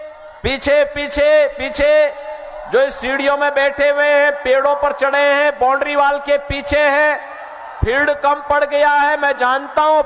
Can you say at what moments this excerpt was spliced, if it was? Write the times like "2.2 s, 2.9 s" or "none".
none